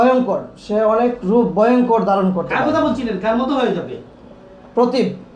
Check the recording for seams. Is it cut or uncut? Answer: uncut